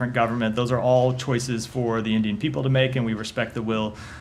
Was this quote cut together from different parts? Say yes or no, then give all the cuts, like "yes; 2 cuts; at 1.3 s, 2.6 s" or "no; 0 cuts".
no; 0 cuts